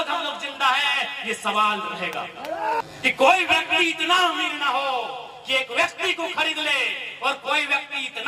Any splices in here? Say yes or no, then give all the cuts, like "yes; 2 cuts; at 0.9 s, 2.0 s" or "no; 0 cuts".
yes; 1 cut; at 2.8 s